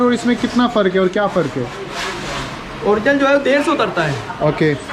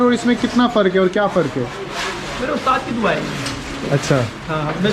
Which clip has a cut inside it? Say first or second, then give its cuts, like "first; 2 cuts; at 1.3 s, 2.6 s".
second; 1 cut; at 2.3 s